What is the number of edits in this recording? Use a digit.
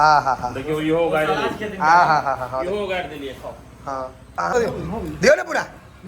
1